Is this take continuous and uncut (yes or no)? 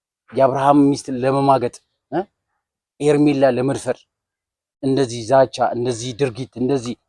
yes